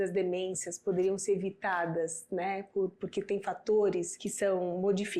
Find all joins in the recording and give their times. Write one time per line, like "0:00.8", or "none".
0:04.2